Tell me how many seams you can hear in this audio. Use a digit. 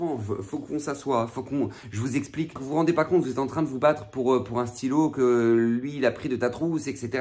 1